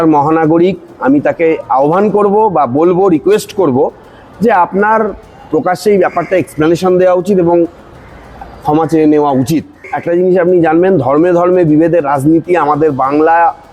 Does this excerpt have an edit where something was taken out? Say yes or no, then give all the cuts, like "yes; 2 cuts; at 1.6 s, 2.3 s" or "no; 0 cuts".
yes; 1 cut; at 9.9 s